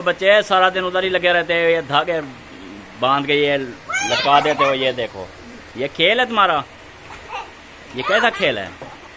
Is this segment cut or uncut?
uncut